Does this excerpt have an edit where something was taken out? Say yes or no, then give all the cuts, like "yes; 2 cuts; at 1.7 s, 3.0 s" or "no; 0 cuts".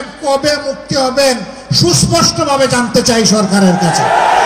no; 0 cuts